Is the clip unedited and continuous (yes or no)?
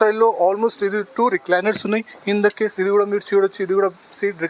yes